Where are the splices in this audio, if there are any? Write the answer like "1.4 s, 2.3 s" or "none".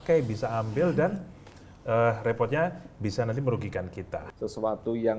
4.2 s